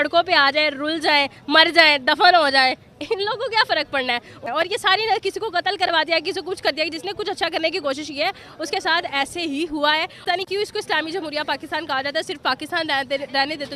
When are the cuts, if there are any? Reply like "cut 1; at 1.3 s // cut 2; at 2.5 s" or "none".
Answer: cut 1; at 4.4 s // cut 2; at 10.2 s